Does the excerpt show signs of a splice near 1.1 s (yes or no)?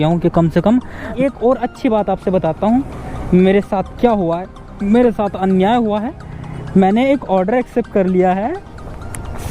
yes